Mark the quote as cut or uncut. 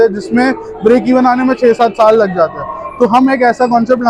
uncut